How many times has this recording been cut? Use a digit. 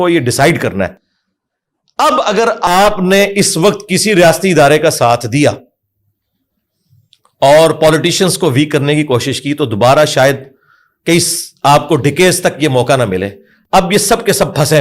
0